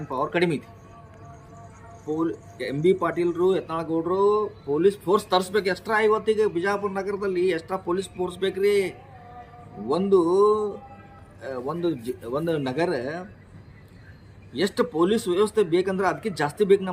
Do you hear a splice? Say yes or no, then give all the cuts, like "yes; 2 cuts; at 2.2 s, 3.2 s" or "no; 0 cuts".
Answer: no; 0 cuts